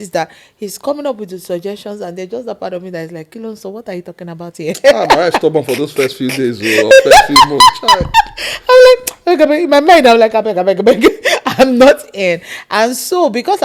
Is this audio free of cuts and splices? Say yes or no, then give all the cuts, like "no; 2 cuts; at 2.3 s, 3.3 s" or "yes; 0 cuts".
yes; 0 cuts